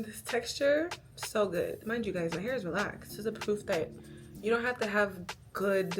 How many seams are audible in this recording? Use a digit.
2